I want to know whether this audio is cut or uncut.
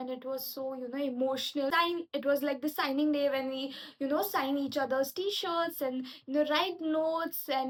uncut